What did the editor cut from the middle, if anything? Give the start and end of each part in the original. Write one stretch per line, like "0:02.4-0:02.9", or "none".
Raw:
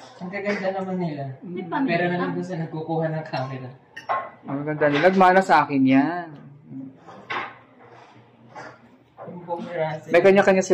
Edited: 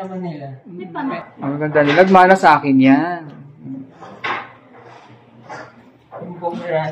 0:01.9-0:04.2